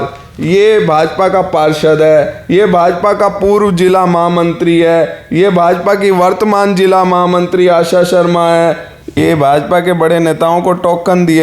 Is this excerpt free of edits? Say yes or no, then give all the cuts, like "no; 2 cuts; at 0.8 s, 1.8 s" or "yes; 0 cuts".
no; 1 cut; at 9.1 s